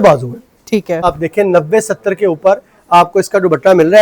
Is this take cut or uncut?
cut